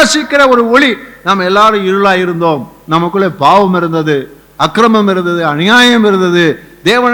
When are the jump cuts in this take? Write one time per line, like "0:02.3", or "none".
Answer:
none